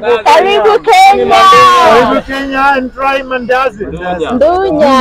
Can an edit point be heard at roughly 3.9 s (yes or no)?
yes